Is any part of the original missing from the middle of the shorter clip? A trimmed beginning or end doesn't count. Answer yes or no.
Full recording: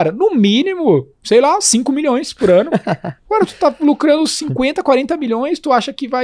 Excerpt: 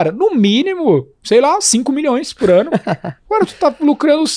no